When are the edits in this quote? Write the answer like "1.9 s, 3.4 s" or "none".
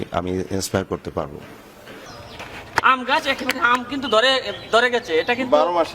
2.0 s